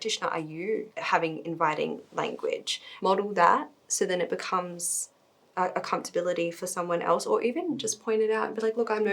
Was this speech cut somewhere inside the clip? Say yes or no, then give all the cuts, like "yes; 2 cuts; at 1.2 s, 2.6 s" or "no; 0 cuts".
yes; 2 cuts; at 0.9 s, 2.8 s